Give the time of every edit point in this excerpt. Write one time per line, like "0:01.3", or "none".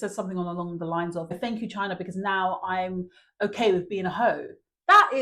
0:01.4